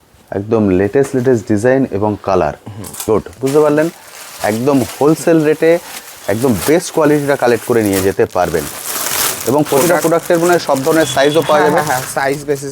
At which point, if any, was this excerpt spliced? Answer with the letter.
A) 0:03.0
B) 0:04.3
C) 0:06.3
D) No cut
A